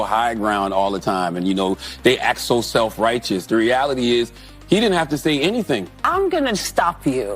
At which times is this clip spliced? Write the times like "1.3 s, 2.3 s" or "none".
6.0 s